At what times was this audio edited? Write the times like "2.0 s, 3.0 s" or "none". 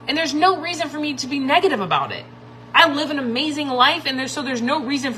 none

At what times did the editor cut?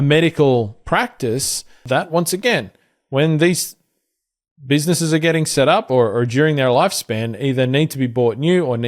1.8 s

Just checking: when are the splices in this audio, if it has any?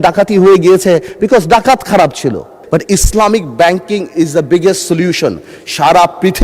2.6 s

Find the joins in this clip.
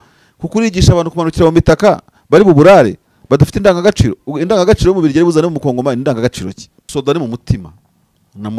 6.9 s

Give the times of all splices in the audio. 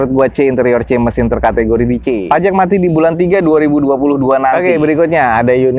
2.2 s, 4.6 s

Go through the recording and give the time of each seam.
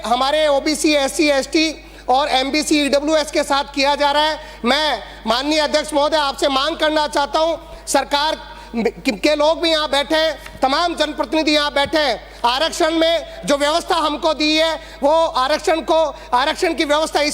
none

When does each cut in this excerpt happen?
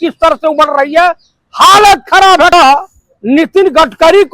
2.5 s

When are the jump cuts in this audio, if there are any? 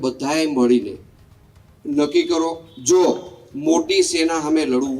2.7 s

